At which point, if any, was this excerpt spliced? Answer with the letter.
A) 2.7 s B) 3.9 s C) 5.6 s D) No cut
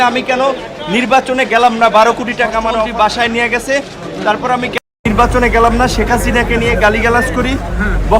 A